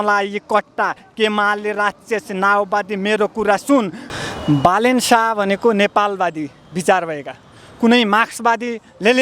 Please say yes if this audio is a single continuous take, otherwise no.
no